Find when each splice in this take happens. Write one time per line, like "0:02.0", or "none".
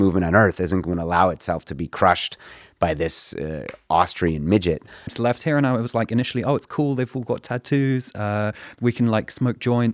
0:05.1